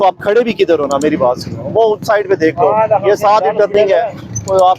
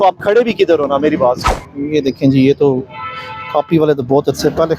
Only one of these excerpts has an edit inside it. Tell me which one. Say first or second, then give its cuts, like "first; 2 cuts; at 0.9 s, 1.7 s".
second; 1 cut; at 1.5 s